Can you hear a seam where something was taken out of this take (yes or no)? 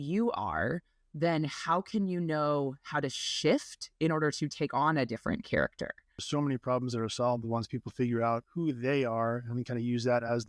yes